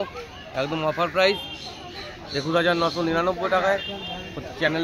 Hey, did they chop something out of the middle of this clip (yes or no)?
no